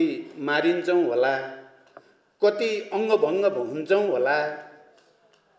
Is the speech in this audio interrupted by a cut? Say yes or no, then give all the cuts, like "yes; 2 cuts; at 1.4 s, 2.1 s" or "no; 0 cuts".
no; 0 cuts